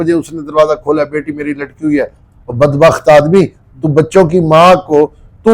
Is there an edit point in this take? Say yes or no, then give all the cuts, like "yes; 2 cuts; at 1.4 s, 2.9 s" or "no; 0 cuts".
no; 0 cuts